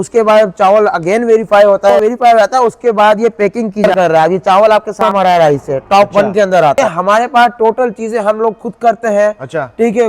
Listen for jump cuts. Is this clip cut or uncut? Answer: cut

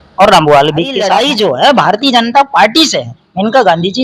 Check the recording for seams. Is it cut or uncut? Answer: cut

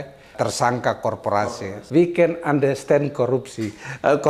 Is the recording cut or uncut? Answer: cut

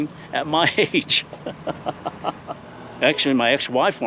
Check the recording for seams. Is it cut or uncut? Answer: cut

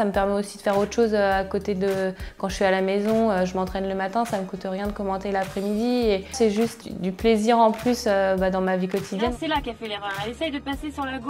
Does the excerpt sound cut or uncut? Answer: cut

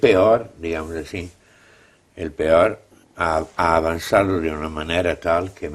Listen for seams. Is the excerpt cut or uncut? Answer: uncut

